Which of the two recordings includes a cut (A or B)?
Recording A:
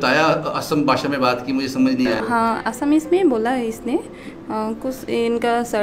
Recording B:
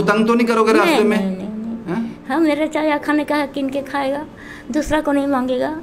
A